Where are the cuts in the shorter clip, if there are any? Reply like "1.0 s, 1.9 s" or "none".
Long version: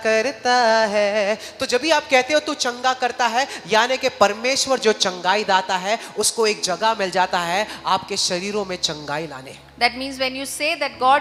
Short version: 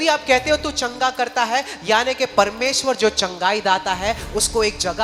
none